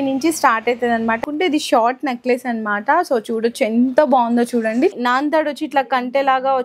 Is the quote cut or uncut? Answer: cut